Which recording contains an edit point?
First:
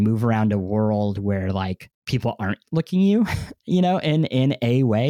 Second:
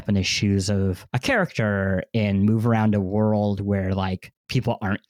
second; 1 cut; at 1.1 s

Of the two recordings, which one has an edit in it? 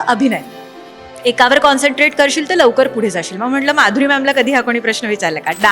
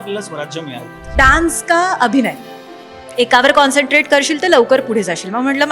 second; 1 cut; at 1.0 s

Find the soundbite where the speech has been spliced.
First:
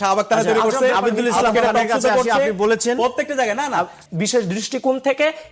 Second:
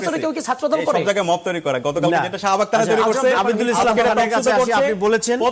first; 1 cut; at 4.0 s

